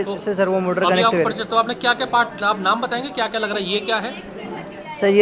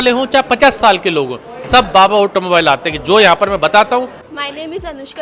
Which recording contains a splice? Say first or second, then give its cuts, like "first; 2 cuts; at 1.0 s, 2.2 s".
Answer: second; 1 cut; at 4.2 s